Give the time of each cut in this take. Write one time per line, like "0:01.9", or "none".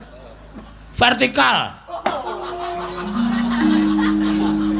none